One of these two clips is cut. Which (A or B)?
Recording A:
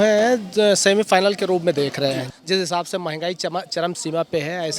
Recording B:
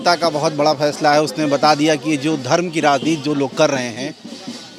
A